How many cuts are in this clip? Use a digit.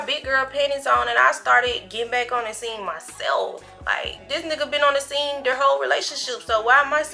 1